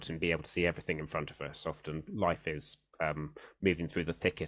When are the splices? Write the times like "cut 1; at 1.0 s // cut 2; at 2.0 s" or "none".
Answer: none